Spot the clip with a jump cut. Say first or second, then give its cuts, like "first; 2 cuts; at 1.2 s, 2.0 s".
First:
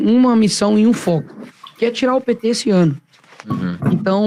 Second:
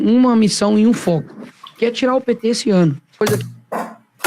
second; 1 cut; at 3.2 s